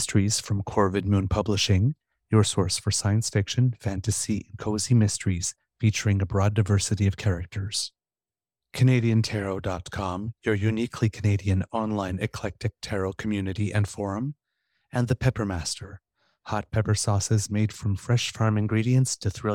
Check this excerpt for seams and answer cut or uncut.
uncut